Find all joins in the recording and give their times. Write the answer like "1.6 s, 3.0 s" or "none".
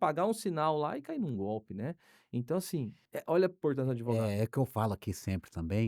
3.0 s